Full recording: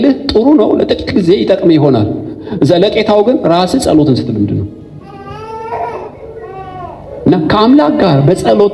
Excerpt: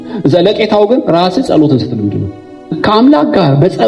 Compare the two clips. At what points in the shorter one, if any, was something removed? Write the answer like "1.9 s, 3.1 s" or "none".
2.8 s